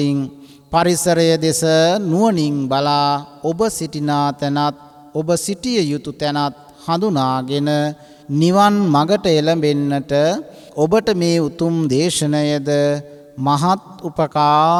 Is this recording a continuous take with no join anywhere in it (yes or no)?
yes